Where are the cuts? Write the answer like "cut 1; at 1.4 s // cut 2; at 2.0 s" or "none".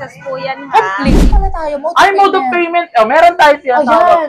cut 1; at 1.2 s